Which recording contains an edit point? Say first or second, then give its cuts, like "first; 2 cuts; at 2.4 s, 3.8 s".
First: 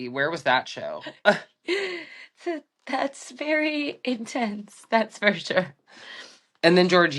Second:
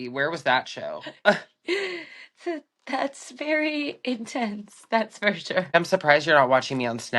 second; 1 cut; at 5.7 s